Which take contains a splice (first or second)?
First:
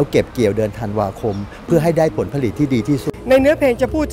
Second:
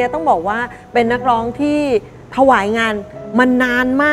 first